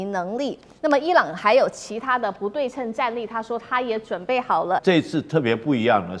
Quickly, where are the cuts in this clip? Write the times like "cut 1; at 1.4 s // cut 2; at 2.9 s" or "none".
cut 1; at 4.8 s